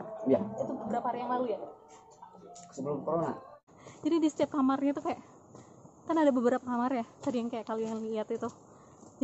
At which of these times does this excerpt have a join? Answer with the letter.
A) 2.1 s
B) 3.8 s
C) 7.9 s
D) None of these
B